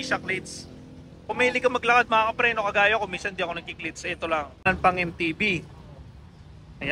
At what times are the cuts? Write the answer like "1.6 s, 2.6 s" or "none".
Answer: 4.7 s